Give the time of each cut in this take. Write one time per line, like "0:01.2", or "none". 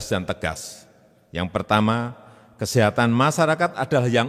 none